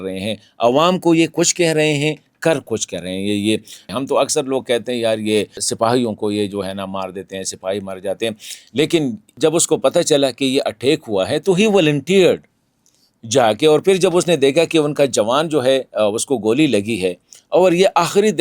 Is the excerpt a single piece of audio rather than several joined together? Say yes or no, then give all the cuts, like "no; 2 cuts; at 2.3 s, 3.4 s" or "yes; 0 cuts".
no; 3 cuts; at 3.8 s, 5.6 s, 9.3 s